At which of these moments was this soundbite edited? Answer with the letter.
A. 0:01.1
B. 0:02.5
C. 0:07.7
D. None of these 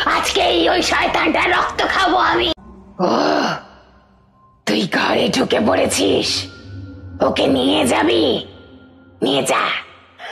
B